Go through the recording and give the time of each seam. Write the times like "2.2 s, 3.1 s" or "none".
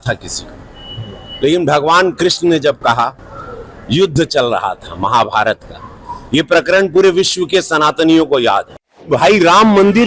9.1 s